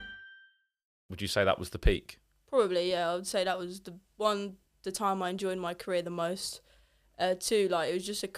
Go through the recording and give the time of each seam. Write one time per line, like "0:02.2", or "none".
0:01.1